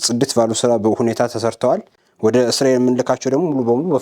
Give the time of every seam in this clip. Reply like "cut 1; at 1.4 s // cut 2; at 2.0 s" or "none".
cut 1; at 1.9 s